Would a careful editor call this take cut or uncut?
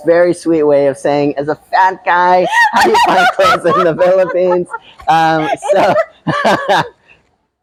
uncut